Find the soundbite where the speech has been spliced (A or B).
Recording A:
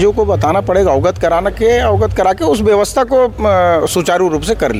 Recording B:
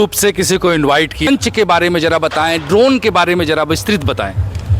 B